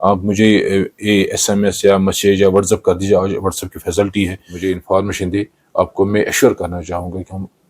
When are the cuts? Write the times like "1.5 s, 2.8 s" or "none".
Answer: 4.5 s